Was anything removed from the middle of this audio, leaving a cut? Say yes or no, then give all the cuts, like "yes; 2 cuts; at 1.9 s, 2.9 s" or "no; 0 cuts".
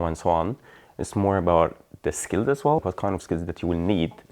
yes; 1 cut; at 2.8 s